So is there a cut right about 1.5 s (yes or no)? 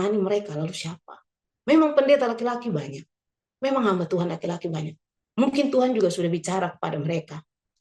yes